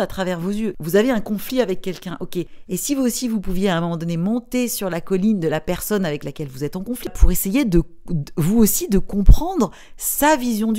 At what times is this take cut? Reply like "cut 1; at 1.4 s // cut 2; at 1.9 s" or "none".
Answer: none